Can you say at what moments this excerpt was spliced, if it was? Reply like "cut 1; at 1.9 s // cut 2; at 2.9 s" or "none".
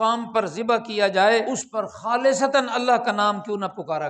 cut 1; at 1.6 s